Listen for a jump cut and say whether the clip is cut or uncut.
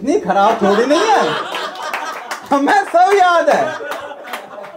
uncut